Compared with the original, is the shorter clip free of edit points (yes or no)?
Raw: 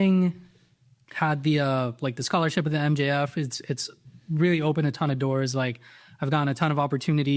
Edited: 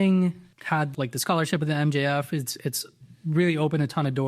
no